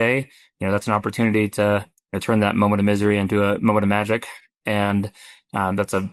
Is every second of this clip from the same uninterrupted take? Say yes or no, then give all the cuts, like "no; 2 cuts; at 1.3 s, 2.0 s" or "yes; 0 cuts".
yes; 0 cuts